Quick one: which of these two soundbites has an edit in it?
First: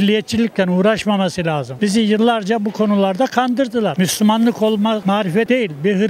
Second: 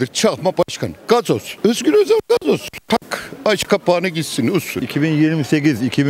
second; 1 cut; at 4.7 s

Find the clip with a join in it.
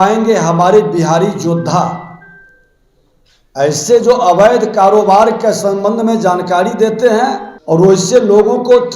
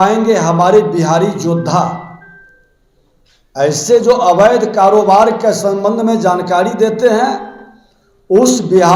first; 1 cut; at 7.6 s

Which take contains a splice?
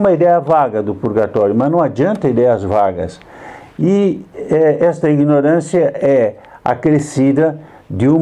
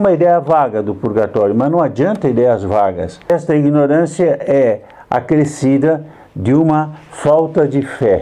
second; 1 cut; at 3.3 s

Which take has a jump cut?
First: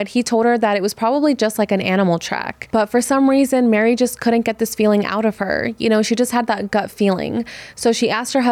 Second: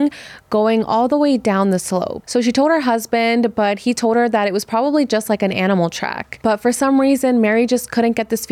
second; 1 cut; at 2.2 s

